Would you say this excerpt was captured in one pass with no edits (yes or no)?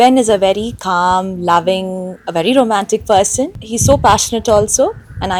yes